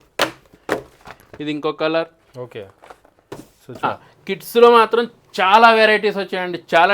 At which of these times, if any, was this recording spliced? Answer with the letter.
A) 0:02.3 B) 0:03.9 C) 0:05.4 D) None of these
B